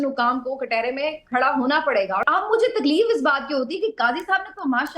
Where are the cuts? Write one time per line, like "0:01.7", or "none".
0:02.2